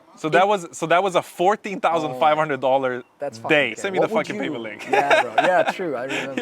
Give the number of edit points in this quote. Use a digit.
1